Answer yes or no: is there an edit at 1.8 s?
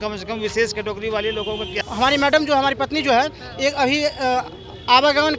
yes